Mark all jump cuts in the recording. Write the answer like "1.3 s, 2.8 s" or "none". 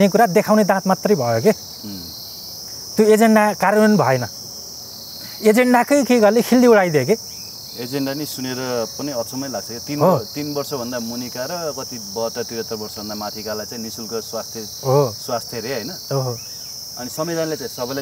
none